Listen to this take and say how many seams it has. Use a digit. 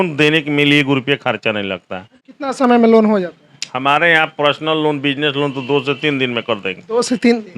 1